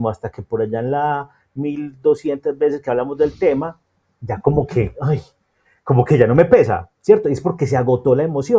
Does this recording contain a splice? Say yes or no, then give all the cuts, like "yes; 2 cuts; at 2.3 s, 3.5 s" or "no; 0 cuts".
no; 0 cuts